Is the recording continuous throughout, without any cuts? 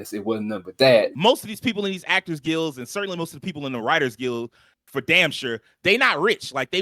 no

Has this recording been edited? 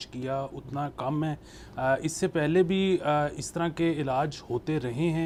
no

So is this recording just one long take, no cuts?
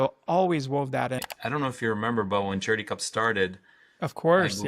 no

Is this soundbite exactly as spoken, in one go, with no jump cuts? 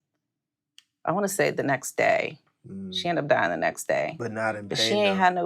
yes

